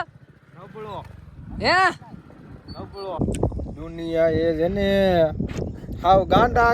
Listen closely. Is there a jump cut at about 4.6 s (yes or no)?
no